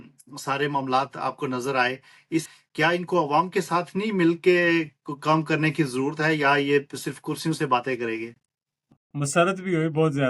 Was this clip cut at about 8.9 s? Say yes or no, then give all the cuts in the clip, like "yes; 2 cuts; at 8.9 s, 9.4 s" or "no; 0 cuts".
yes; 2 cuts; at 2.6 s, 8.9 s